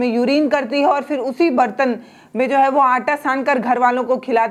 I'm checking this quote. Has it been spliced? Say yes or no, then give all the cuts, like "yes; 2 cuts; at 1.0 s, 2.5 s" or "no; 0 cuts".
no; 0 cuts